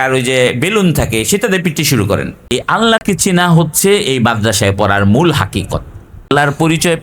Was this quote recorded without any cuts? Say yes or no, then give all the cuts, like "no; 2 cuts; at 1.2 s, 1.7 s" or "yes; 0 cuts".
no; 2 cuts; at 2.3 s, 6.2 s